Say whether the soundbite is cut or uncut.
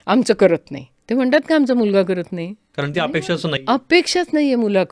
cut